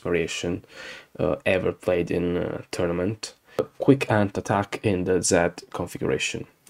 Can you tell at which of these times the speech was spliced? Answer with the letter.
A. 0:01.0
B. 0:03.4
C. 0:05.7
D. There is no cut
B